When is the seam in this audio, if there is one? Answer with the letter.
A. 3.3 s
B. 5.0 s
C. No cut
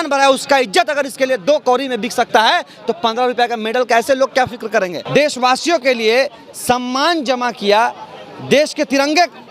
B